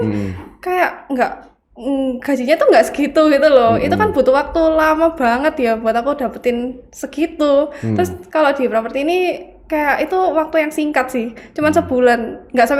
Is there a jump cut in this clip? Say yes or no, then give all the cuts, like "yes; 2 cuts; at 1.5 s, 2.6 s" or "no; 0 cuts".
no; 0 cuts